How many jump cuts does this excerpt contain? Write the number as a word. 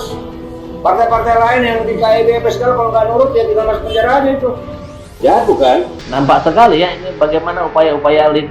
one